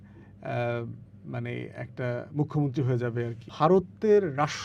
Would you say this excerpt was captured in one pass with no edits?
no; 1 cut; at 3.4 s

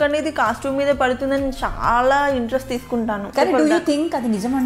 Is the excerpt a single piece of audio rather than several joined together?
no; 1 cut; at 3.3 s

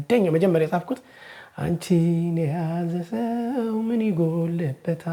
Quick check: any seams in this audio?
no; 0 cuts

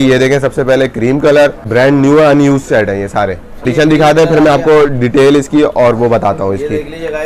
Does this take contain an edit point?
yes; 2 cuts; at 1.7 s, 3.6 s

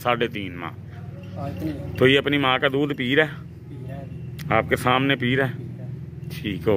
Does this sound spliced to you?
no; 0 cuts

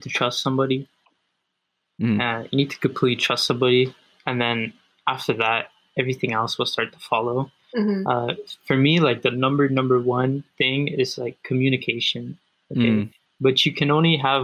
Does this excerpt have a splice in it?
no; 0 cuts

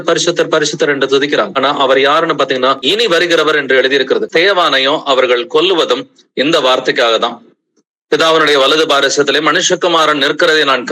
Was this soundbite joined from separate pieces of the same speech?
yes; 3 cuts; at 1.5 s, 2.8 s, 4.3 s

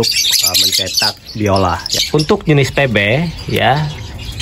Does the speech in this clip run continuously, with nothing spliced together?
no; 1 cut; at 1.9 s

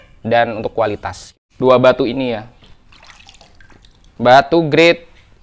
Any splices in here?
yes; 1 cut; at 1.4 s

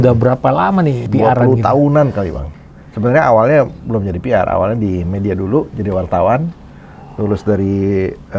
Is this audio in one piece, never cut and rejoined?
no; 2 cuts; at 1.1 s, 2.4 s

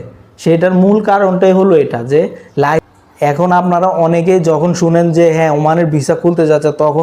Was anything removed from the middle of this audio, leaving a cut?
yes; 1 cut; at 2.9 s

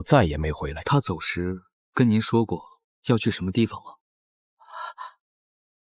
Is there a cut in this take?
no; 0 cuts

